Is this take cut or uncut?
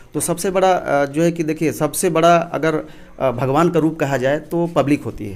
uncut